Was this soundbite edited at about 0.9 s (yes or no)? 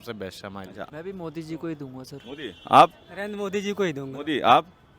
yes